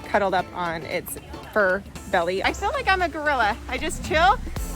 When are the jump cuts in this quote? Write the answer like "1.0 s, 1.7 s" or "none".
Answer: 2.4 s